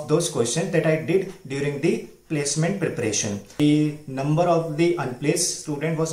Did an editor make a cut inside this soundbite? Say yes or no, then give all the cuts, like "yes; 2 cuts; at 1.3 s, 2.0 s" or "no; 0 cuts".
yes; 1 cut; at 3.5 s